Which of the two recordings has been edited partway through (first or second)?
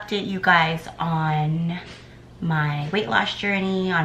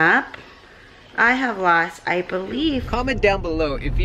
second